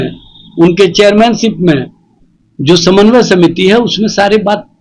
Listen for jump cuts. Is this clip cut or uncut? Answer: uncut